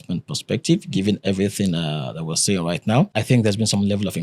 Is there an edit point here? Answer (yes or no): yes